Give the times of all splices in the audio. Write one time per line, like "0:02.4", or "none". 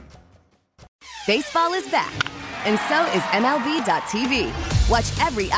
0:00.9